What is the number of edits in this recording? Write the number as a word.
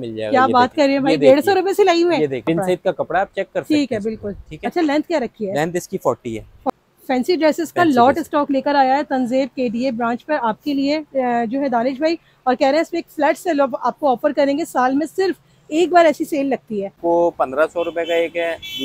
three